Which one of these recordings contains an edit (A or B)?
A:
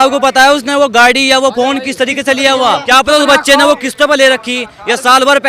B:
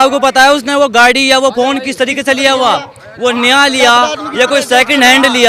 A